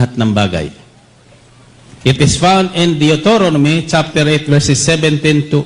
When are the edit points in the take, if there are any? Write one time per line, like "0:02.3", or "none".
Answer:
none